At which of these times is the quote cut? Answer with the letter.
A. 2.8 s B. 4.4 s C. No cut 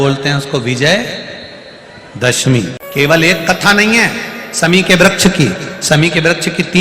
A